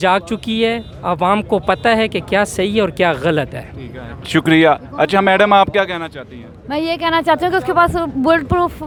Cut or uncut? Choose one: uncut